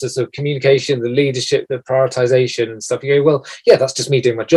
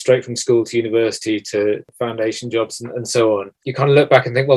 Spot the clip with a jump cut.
second; 2 cuts; at 1.9 s, 3.6 s

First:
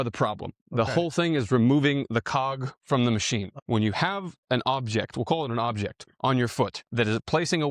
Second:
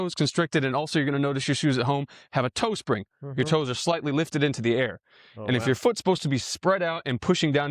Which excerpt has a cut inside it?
first; 2 cuts; at 3.5 s, 6.8 s

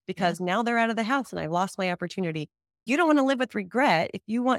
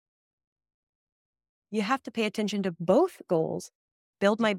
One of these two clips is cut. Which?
first; 1 cut; at 2.8 s

